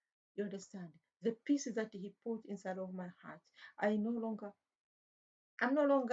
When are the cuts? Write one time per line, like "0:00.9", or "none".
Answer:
none